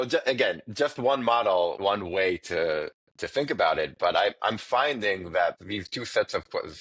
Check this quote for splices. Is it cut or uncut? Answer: cut